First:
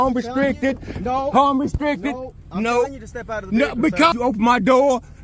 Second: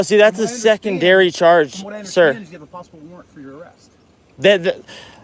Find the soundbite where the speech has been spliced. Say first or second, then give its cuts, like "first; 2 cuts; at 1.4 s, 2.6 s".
first; 1 cut; at 4.1 s